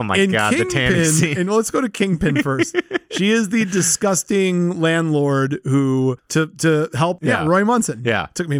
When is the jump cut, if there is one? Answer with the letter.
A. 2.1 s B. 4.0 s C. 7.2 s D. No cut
C